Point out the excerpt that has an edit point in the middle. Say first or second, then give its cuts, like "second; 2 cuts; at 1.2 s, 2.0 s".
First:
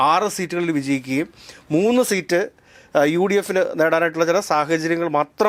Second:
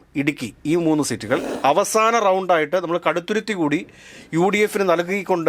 second; 1 cut; at 1.5 s